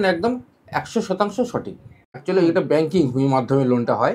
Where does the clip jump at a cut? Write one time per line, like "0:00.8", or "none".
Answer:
0:02.1